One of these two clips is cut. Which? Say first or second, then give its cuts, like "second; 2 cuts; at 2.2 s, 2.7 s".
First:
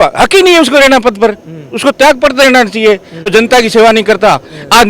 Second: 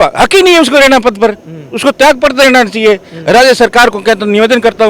first; 1 cut; at 3.3 s